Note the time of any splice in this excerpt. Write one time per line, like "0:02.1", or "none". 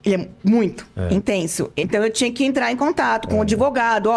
0:01.8